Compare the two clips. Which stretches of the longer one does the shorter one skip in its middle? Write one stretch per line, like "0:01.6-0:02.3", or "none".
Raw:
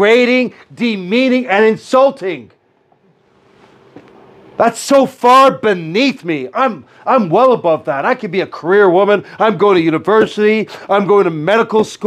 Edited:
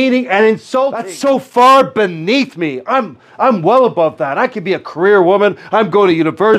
0:02.3-0:04.8